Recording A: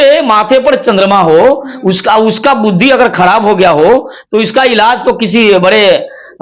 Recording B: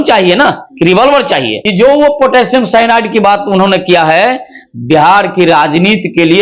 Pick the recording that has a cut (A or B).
B